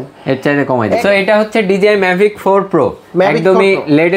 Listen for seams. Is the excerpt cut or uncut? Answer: cut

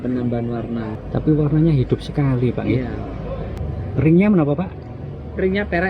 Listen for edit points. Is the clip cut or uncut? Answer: cut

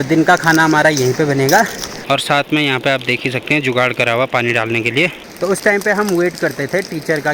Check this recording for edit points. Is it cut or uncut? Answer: cut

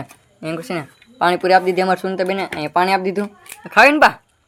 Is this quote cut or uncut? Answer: uncut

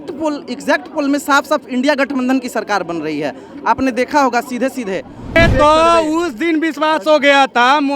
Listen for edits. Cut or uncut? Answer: cut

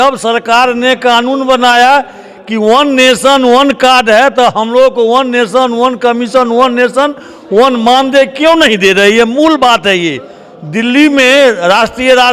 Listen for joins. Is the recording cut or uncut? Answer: cut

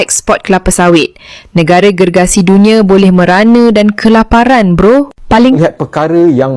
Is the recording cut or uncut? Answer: cut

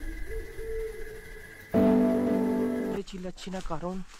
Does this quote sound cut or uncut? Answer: cut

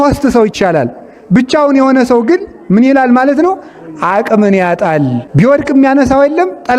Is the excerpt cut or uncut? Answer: cut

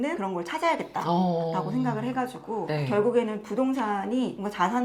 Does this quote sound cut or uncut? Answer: uncut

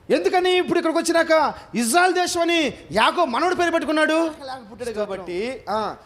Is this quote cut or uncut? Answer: cut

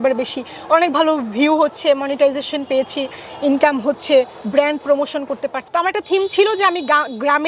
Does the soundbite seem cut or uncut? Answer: cut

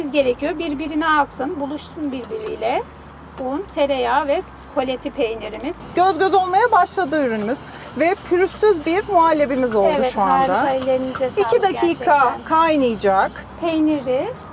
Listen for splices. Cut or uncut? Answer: cut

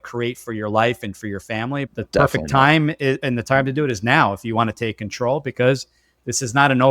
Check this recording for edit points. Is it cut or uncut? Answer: cut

